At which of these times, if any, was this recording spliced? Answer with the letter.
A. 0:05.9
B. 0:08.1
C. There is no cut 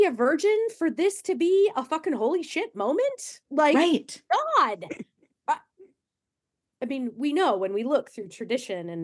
C